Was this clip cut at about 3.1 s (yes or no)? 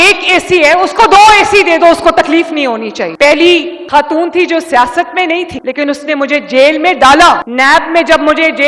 yes